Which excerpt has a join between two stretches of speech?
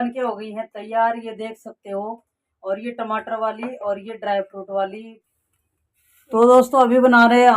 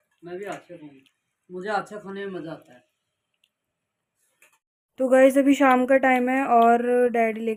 first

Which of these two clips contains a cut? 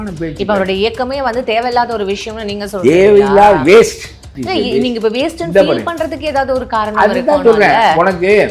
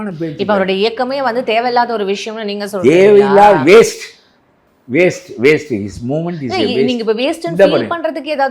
first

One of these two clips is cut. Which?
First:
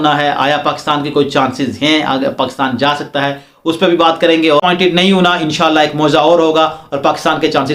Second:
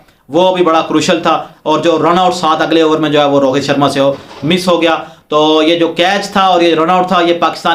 first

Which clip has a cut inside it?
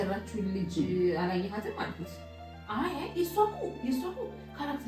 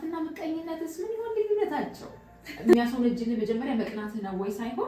second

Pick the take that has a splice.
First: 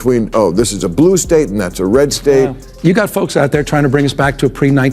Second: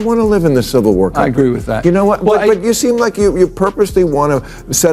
first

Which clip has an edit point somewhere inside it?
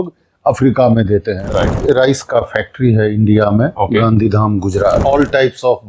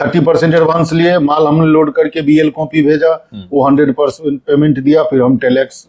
first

